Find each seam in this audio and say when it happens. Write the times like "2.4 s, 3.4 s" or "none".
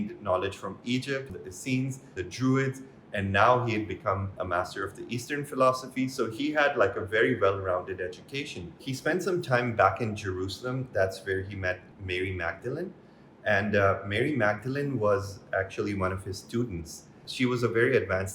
1.3 s, 2.2 s, 4.3 s, 8.8 s